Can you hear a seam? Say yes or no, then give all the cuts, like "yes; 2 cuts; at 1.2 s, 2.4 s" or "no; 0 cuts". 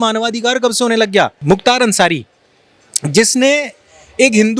yes; 1 cut; at 1.4 s